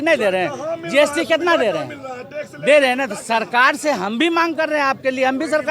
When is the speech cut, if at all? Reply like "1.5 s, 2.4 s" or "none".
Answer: none